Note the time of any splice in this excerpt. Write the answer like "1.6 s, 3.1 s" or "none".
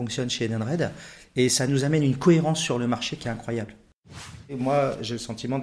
4.4 s